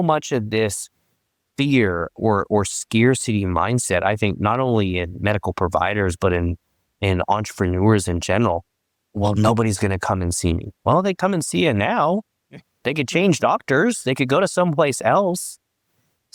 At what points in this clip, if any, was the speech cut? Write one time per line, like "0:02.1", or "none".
none